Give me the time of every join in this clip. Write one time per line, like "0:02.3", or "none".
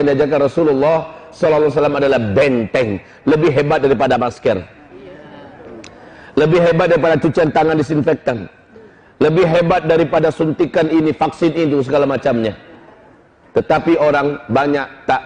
none